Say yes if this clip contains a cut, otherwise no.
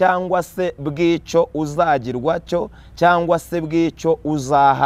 no